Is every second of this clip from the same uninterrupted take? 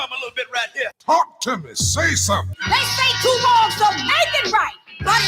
no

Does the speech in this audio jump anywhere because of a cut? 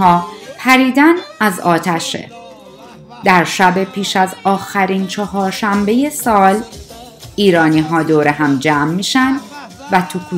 no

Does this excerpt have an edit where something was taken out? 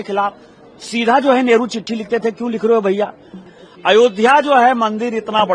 yes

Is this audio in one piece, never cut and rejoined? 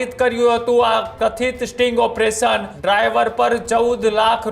no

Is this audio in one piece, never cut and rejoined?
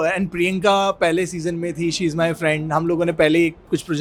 yes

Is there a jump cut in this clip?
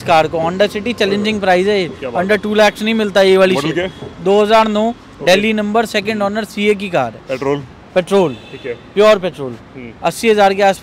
no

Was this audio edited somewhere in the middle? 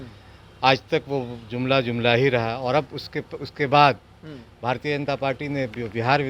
no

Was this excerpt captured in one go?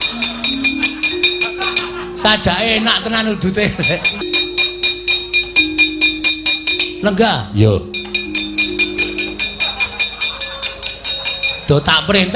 no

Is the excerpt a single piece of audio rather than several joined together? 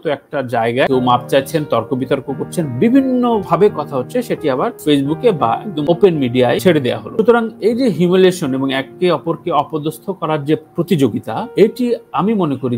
yes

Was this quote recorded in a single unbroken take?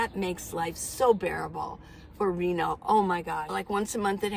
no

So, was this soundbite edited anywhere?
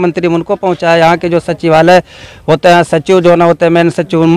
no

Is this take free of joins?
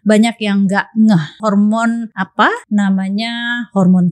no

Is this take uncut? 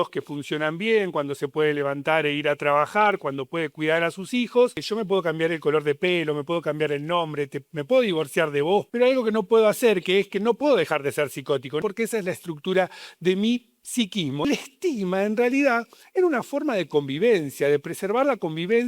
no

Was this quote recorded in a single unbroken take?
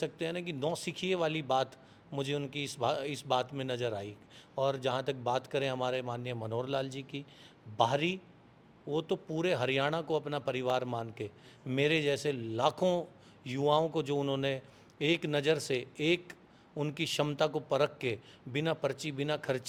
yes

